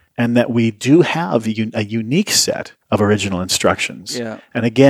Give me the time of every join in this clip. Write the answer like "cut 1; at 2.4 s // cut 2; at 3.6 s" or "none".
cut 1; at 2.7 s